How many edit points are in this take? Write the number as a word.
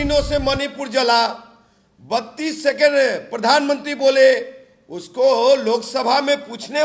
zero